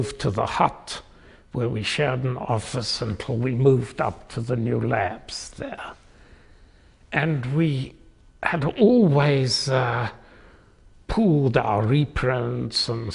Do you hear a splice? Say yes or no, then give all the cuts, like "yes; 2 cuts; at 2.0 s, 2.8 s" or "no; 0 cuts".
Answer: yes; 1 cut; at 1.9 s